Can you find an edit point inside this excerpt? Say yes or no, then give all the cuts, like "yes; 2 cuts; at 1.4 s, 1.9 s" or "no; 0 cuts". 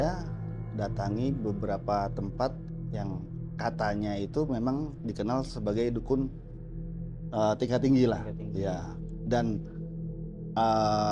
no; 0 cuts